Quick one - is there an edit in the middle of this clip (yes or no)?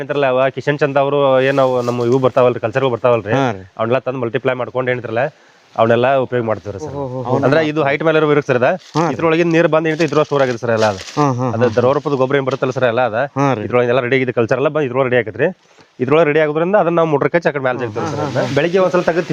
yes